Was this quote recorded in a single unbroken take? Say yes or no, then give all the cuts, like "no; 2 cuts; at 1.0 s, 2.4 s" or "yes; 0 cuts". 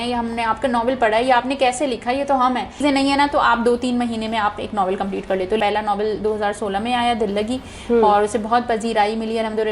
no; 2 cuts; at 2.8 s, 5.6 s